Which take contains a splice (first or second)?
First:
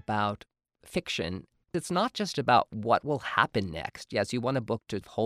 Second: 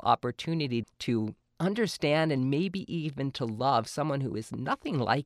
first